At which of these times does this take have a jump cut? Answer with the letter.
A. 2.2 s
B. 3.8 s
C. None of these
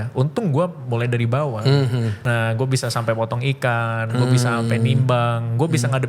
A